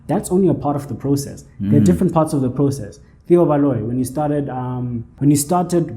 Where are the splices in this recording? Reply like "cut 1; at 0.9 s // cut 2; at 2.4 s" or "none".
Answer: cut 1; at 5.1 s